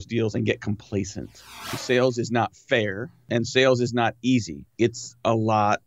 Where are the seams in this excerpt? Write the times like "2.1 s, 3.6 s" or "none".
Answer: 1.8 s, 3.3 s, 4.6 s